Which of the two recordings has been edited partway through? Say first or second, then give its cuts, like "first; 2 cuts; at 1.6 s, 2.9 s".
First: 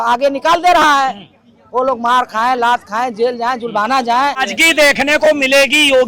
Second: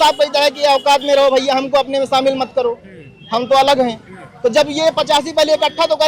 first; 1 cut; at 4.5 s